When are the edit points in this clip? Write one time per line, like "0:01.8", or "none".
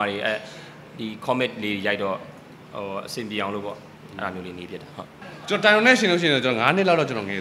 0:05.2